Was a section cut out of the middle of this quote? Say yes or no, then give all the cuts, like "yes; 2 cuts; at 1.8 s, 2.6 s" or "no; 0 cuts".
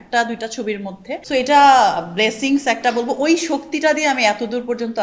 yes; 1 cut; at 1.0 s